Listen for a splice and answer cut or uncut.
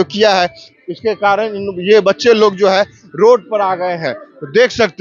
uncut